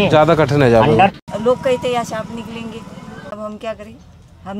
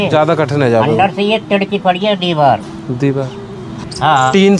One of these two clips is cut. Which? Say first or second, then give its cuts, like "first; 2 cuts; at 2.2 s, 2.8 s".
first; 2 cuts; at 1.1 s, 3.3 s